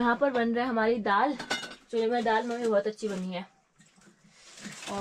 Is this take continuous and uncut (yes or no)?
yes